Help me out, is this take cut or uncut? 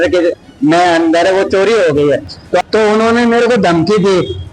cut